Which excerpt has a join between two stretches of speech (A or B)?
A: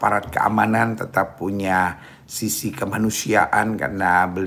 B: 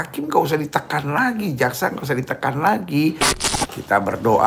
B